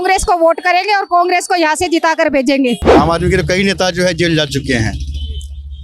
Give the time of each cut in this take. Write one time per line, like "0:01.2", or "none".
0:02.9